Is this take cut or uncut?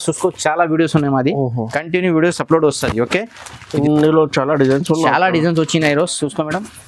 cut